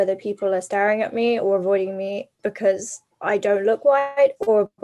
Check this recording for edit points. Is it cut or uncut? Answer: uncut